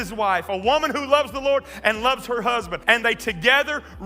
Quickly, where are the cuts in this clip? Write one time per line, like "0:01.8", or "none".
0:02.7